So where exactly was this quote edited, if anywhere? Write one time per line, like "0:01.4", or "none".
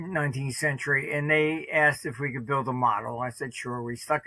none

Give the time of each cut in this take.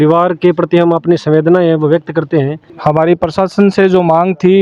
0:02.7

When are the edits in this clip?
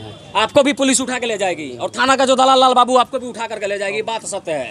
none

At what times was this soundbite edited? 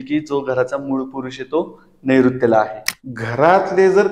0:02.8

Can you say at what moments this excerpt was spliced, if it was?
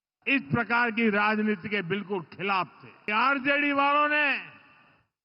0:03.1

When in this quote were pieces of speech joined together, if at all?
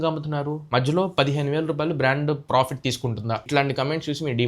0:03.4

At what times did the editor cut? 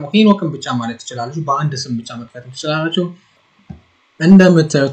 0:03.4

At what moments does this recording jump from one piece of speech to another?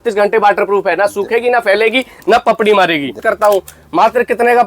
0:03.2

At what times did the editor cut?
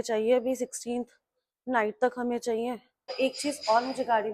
0:03.1

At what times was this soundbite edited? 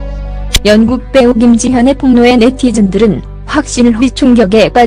none

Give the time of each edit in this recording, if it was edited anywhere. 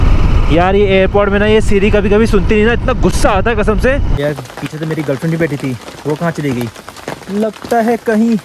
0:04.1

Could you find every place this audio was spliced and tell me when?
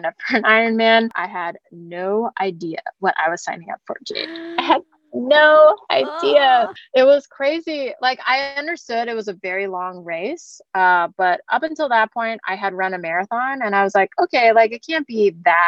0:01.2
0:06.8

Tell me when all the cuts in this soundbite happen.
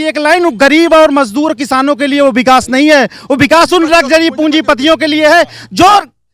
none

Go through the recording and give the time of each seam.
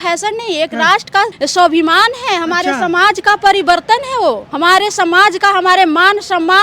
0:01.3
0:04.5

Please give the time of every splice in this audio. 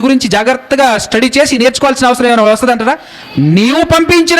0:03.1

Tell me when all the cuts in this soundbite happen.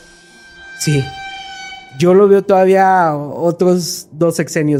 none

